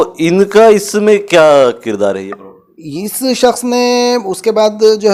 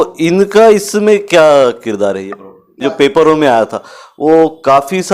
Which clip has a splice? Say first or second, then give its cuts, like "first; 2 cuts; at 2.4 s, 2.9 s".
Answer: second; 1 cut; at 2.8 s